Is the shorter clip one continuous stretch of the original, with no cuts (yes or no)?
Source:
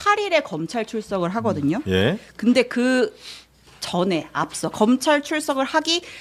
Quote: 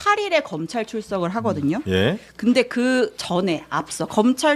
no